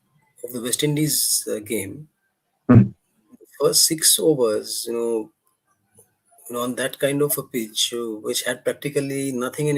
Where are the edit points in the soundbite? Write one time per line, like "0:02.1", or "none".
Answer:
none